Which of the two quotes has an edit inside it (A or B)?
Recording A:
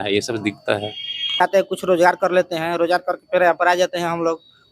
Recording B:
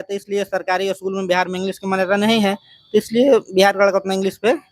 A